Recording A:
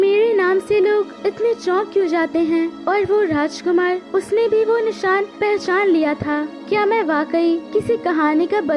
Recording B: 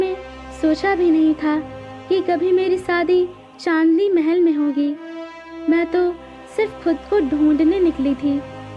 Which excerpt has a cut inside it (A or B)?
A